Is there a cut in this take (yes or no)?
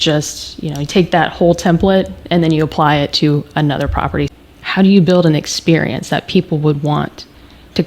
yes